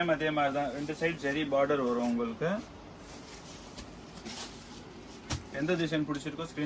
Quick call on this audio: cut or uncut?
uncut